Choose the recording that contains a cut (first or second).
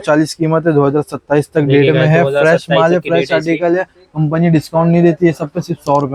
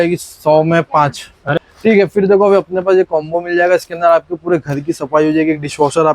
second